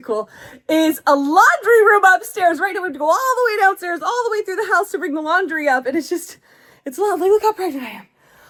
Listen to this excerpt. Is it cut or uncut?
uncut